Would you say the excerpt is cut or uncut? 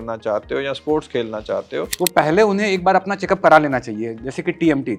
cut